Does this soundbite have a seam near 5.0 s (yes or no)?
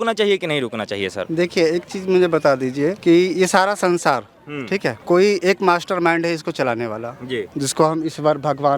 yes